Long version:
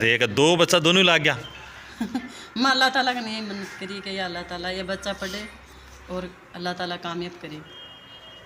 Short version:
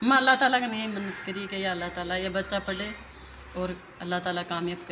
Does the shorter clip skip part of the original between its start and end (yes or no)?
no